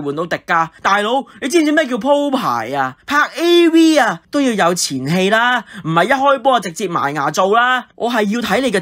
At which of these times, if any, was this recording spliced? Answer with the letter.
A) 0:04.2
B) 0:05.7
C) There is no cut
C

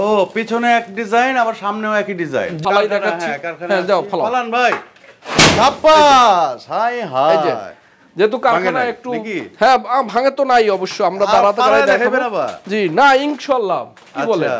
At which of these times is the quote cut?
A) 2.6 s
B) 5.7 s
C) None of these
A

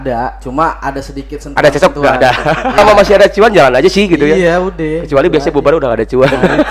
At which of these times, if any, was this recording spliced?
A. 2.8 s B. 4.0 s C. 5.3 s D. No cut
A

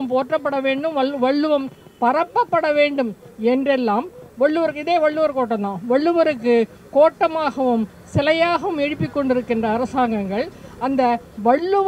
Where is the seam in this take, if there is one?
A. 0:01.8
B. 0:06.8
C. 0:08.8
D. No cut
D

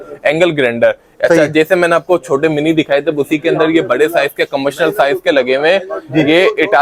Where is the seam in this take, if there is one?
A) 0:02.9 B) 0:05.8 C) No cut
C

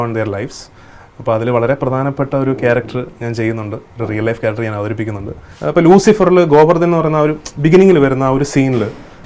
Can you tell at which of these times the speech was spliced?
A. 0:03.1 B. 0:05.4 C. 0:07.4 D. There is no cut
B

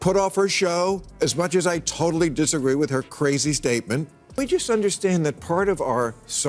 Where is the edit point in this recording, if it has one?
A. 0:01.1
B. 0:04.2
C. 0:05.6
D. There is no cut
B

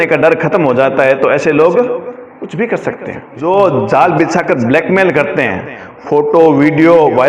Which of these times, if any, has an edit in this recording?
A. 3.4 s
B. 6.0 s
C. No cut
A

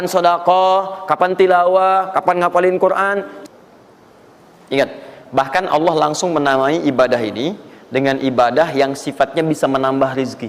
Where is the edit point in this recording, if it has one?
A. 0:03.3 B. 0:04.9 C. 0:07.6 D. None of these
A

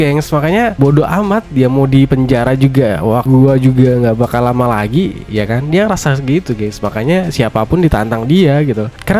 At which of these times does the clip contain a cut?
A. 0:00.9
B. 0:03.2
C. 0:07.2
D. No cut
B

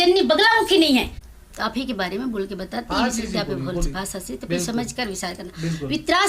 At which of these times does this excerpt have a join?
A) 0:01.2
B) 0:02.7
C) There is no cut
A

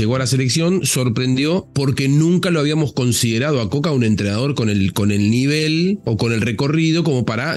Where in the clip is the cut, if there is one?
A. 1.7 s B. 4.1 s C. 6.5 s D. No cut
A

